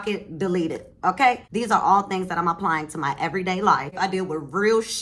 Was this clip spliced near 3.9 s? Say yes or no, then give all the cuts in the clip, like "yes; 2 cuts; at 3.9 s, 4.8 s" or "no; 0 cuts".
yes; 2 cuts; at 1.5 s, 3.9 s